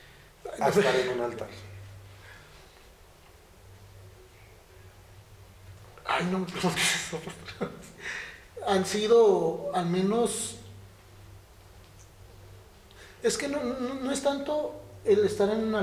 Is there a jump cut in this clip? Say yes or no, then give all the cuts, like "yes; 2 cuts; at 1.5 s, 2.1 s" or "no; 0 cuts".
no; 0 cuts